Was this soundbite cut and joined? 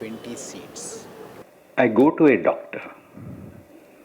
yes; 1 cut; at 1.4 s

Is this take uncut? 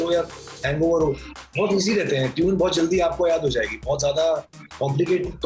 yes; 0 cuts

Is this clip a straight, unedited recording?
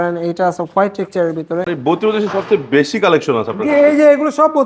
no; 1 cut; at 1.7 s

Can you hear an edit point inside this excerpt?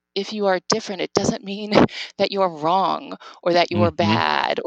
no; 0 cuts

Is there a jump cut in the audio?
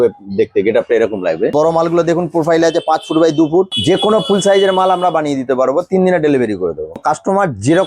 yes; 3 cuts; at 1.5 s, 3.8 s, 7.0 s

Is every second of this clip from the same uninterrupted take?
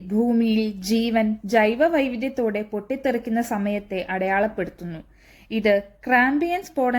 yes; 0 cuts

